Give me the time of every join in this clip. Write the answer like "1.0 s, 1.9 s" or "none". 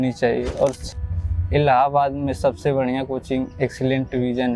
0.9 s